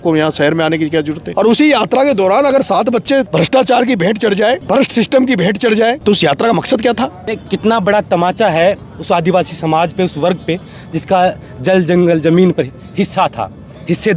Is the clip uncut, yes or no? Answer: no